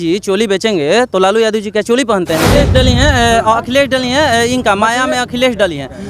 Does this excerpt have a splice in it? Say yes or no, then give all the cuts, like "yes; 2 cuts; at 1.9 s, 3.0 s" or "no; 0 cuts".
yes; 1 cut; at 2.5 s